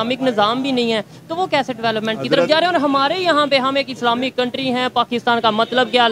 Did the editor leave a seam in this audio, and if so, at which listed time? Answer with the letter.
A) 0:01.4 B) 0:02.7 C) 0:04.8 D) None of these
D